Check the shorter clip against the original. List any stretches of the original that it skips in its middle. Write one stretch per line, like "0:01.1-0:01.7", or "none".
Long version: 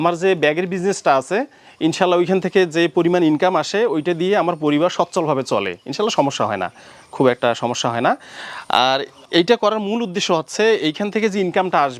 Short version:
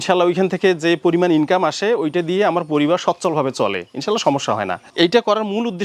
0:06.7-0:09.2